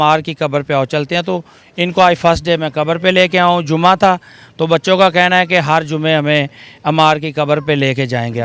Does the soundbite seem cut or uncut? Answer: uncut